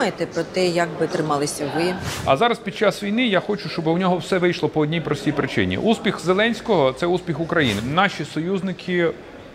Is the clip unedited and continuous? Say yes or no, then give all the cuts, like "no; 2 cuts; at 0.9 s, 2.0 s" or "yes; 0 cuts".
no; 2 cuts; at 2.1 s, 7.8 s